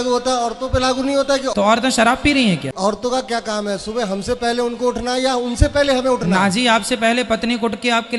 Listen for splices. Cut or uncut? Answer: cut